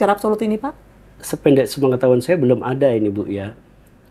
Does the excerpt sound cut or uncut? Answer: uncut